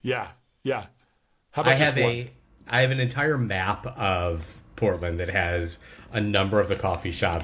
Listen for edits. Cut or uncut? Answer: uncut